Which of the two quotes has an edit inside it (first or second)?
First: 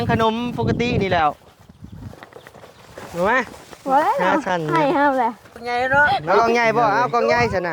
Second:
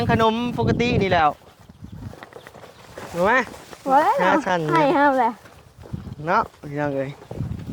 first